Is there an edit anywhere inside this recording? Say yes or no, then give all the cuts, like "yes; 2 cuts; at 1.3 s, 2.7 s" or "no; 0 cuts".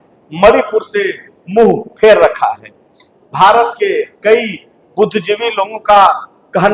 no; 0 cuts